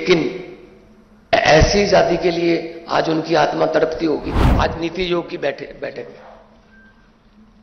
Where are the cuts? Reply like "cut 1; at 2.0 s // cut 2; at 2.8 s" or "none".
cut 1; at 4.4 s